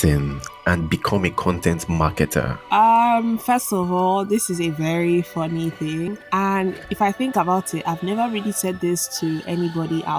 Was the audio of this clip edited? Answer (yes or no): yes